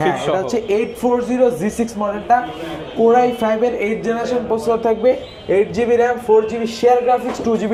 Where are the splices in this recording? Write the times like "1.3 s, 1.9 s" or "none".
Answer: none